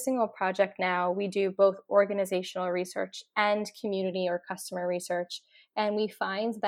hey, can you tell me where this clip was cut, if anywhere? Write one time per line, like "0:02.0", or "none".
none